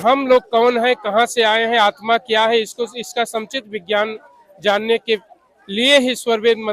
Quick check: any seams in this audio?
no; 0 cuts

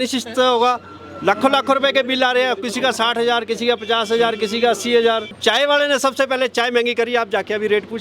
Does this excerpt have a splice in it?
yes; 1 cut; at 5.4 s

